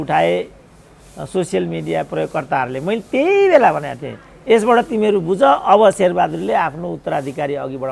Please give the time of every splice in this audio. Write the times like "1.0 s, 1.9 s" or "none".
none